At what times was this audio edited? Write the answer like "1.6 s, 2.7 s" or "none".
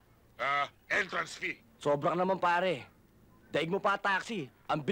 1.7 s